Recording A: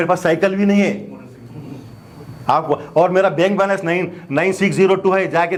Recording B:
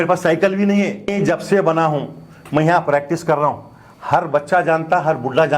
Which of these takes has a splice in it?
B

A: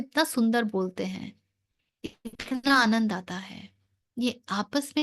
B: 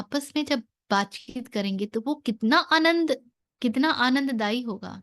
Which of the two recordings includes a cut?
B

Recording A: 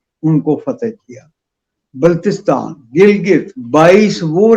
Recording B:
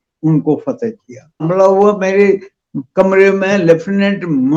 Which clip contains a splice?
B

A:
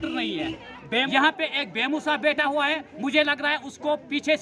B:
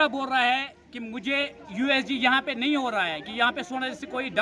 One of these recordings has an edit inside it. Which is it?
A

